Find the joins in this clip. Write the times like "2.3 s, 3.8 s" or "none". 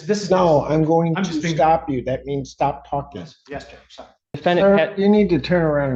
4.4 s